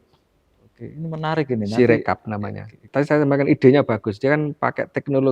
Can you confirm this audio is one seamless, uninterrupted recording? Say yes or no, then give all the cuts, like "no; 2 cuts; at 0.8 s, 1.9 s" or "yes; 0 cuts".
no; 1 cut; at 2.8 s